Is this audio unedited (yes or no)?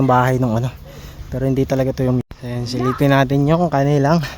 no